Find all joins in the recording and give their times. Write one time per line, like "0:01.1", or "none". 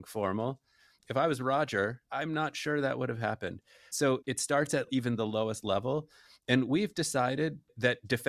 0:01.1
0:02.0
0:04.0